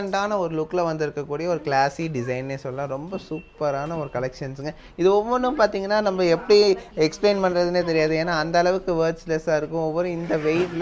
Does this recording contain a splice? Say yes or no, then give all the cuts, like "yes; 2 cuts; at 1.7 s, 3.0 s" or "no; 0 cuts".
no; 0 cuts